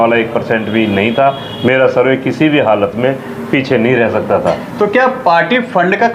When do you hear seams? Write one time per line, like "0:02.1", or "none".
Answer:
none